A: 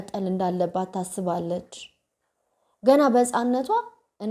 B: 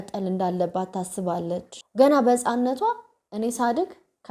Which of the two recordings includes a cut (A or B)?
B